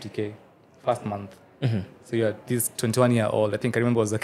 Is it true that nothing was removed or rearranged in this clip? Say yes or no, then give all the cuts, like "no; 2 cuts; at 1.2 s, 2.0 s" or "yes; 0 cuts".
yes; 0 cuts